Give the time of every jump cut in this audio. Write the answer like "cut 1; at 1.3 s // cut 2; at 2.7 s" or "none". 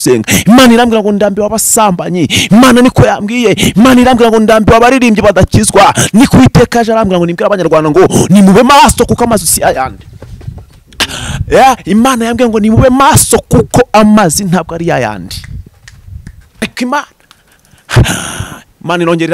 cut 1; at 16.6 s